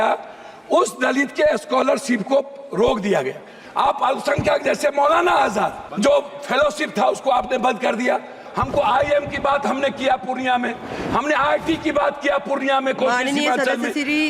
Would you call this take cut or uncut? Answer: cut